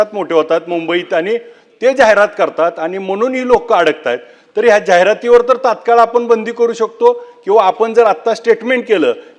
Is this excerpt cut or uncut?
uncut